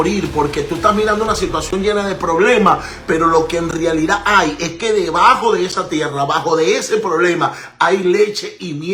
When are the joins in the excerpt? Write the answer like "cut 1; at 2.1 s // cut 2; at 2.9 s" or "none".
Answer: none